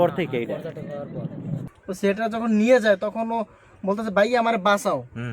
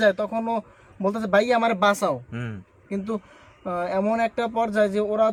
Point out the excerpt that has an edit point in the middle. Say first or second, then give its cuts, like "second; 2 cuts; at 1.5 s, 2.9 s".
first; 1 cut; at 1.6 s